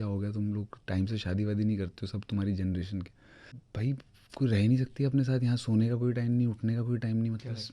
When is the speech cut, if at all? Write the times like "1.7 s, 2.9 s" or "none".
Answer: 3.7 s